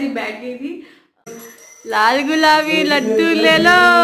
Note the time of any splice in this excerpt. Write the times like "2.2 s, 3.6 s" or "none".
1.3 s